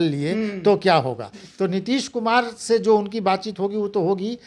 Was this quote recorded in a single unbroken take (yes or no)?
yes